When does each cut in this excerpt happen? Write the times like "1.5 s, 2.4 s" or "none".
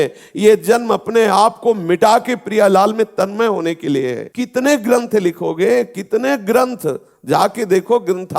4.2 s